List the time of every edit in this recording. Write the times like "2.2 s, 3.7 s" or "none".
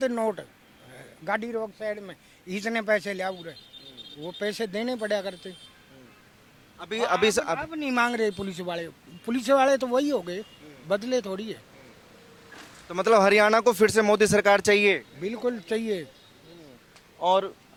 none

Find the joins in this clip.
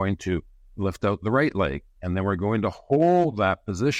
none

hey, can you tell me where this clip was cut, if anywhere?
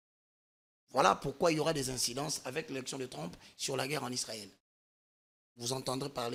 none

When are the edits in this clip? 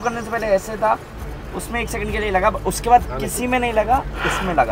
none

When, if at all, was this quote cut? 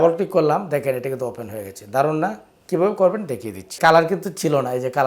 3.7 s

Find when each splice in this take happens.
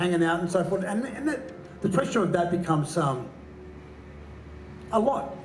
none

